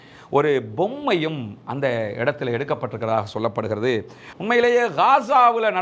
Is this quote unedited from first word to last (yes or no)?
no